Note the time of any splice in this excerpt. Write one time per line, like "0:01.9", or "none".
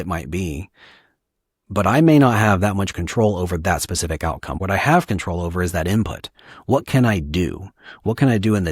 0:04.5